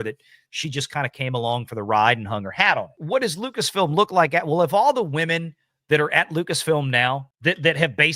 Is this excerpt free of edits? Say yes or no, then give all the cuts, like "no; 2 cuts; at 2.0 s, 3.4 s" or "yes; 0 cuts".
yes; 0 cuts